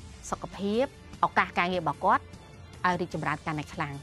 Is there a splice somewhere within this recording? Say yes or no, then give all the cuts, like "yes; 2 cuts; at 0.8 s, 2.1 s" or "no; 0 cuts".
yes; 1 cut; at 1.0 s